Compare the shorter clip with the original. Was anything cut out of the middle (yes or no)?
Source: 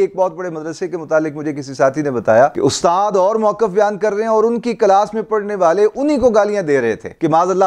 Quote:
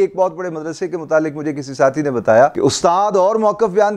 no